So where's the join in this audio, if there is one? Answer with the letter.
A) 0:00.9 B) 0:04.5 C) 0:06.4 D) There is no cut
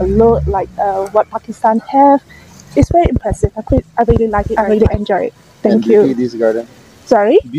B